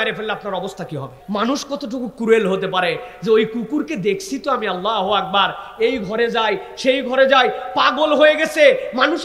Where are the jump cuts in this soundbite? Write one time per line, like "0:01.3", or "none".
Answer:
0:01.2